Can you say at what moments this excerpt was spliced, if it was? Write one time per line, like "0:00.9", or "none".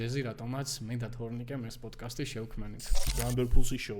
0:03.1